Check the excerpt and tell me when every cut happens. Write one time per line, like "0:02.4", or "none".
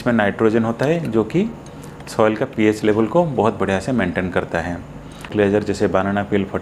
0:05.3